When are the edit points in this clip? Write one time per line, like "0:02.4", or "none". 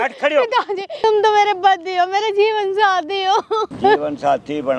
0:01.0
0:03.7